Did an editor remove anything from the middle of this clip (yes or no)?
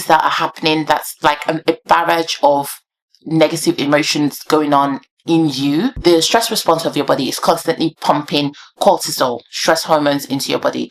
yes